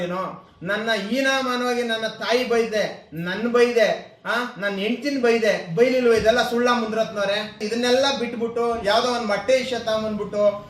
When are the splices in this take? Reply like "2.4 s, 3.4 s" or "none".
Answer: 7.6 s